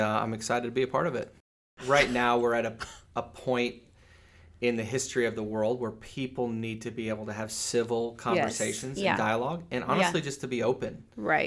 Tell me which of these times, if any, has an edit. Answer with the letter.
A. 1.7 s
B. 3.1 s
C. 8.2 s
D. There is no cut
A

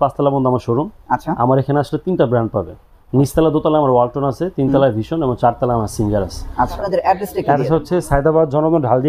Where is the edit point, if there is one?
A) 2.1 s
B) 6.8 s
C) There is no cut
B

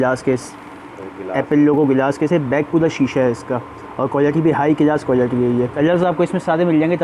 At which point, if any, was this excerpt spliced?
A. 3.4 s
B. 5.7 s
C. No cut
B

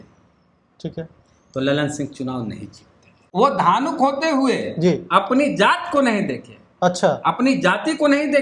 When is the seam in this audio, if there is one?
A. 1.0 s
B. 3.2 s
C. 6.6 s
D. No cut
B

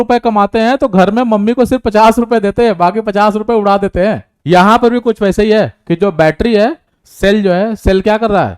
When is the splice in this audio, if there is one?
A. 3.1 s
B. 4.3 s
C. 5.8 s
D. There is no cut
B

